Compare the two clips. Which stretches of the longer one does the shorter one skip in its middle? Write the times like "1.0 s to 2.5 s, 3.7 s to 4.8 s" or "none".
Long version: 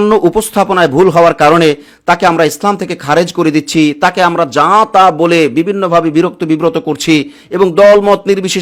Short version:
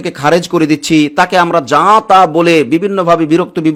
none